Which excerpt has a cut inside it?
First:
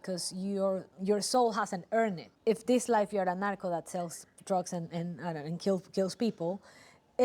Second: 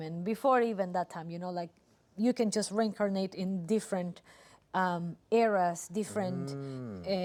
first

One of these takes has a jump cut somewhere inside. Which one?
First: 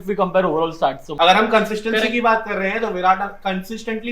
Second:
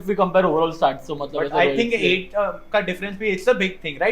first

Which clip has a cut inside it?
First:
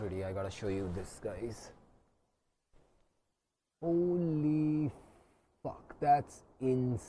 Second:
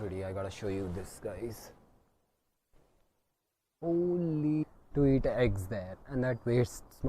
second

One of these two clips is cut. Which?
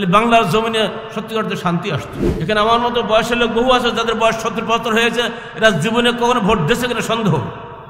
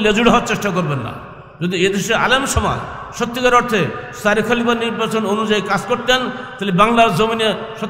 first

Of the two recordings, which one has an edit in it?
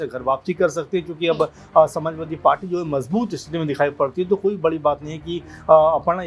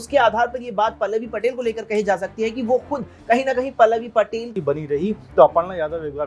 second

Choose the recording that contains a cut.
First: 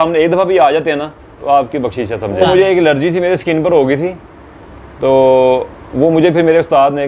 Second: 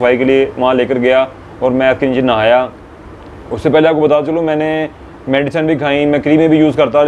first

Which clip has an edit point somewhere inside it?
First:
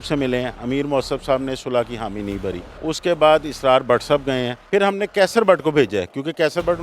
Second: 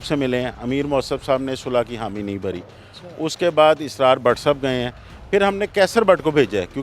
first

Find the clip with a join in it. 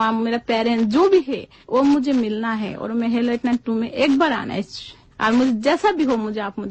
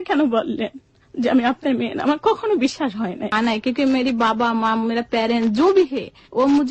second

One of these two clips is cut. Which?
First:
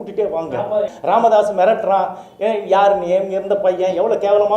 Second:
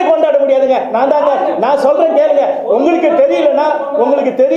first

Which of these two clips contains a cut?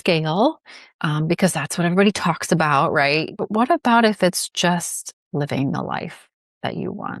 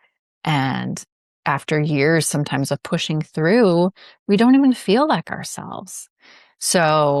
first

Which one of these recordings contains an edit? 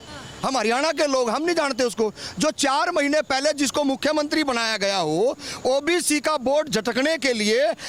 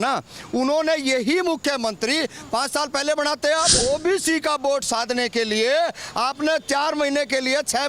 second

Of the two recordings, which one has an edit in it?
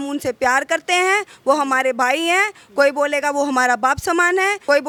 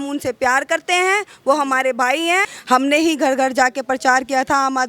second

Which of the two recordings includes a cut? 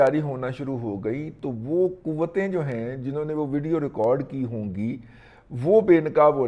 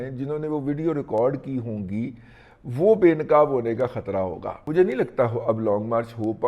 second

